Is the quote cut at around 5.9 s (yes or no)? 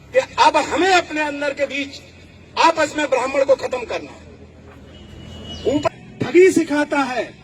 yes